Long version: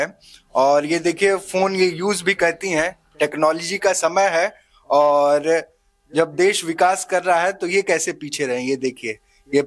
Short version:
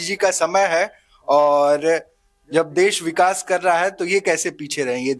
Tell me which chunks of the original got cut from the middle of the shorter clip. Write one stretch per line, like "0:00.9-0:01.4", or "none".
none